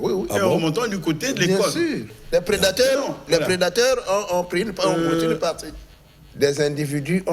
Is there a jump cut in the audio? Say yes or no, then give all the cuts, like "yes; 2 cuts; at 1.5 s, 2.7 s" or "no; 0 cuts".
yes; 2 cuts; at 2.1 s, 5.7 s